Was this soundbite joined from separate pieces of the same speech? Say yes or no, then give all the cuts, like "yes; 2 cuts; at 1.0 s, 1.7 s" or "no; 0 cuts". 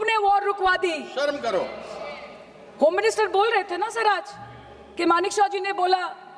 no; 0 cuts